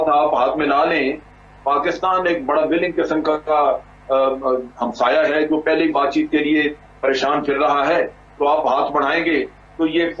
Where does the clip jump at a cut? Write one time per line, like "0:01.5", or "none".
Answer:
none